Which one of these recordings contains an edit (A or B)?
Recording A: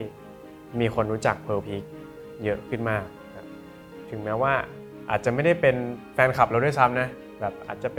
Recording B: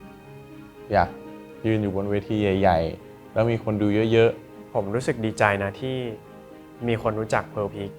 B